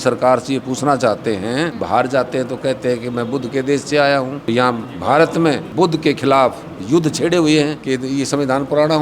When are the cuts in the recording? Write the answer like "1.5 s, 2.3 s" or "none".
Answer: 1.8 s, 4.5 s, 5.7 s, 7.8 s